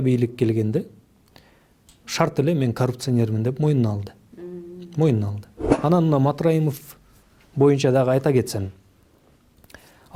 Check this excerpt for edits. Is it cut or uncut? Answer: cut